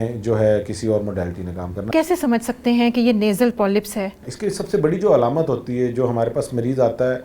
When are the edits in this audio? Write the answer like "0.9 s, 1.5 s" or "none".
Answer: 1.9 s, 4.3 s

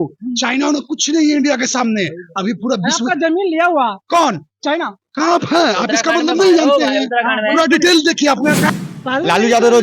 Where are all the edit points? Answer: 8.7 s

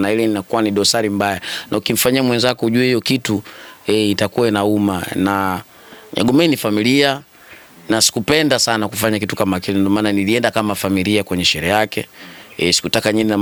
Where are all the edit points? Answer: none

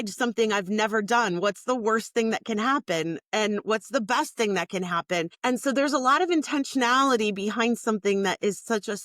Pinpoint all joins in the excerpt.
5.3 s

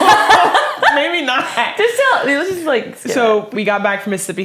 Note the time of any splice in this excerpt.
3.5 s

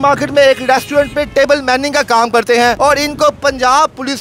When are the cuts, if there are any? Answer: 2.8 s

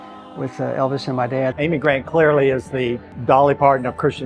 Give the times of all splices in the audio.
1.5 s, 3.1 s

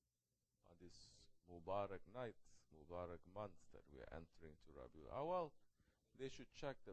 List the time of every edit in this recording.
none

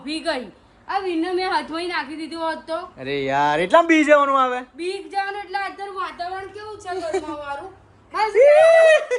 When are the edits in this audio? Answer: 2.9 s

